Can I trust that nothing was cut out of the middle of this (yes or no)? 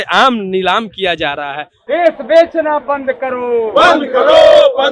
no